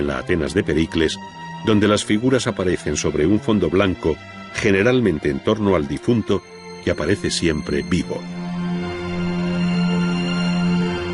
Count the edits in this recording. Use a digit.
0